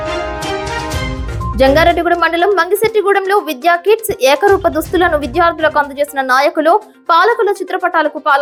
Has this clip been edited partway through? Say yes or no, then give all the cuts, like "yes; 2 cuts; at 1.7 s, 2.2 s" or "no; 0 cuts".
no; 0 cuts